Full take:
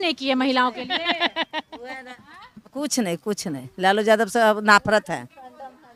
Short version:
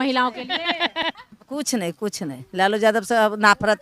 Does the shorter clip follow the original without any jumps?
no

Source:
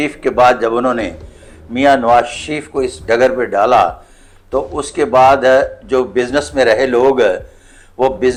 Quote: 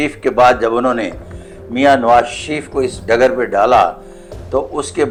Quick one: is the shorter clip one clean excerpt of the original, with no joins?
yes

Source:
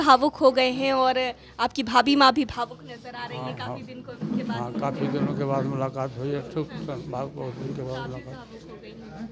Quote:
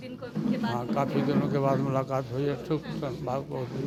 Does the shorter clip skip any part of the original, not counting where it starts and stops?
no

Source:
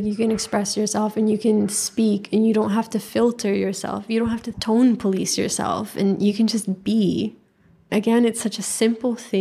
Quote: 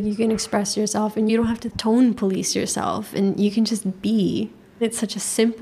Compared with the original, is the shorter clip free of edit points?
no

